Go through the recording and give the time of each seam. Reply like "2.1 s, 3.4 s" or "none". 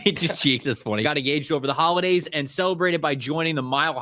1.1 s